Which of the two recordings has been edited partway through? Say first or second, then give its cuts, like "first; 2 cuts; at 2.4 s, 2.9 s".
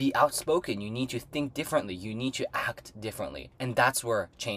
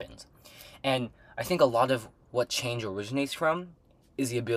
first; 1 cut; at 3.5 s